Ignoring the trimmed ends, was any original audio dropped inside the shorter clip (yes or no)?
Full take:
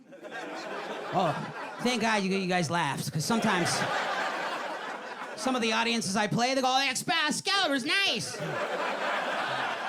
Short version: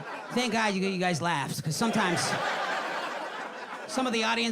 no